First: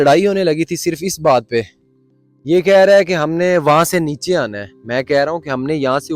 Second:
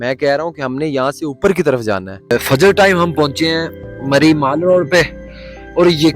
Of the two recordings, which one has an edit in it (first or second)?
second